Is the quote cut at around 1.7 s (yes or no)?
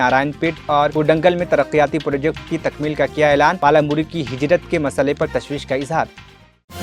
no